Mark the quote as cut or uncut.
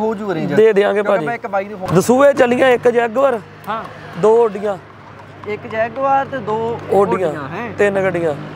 cut